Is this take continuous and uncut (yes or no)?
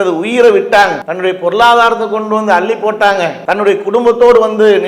no